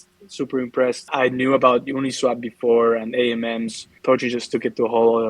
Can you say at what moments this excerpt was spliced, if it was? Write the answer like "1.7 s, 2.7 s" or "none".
1.1 s, 3.9 s